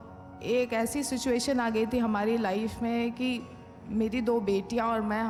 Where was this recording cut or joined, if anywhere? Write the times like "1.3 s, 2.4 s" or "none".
none